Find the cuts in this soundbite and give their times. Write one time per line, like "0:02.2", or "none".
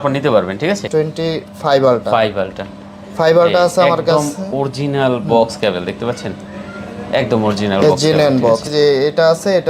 0:00.8
0:08.7